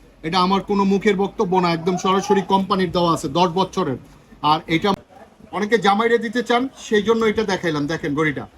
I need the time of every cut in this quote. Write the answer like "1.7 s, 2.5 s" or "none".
4.9 s